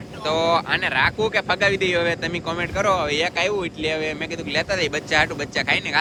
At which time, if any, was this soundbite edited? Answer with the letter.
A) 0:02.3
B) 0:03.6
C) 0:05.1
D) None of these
D